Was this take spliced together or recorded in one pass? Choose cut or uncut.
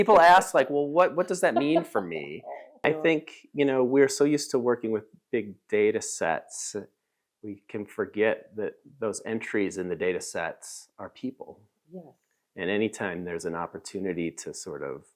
cut